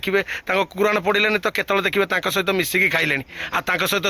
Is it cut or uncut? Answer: uncut